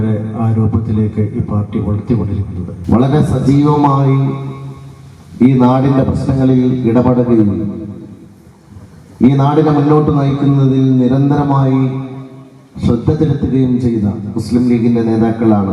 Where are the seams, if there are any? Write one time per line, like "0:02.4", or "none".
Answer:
0:02.7